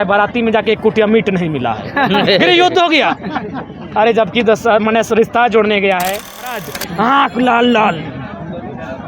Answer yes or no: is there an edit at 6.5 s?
yes